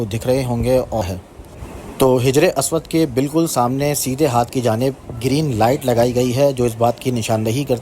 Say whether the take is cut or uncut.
cut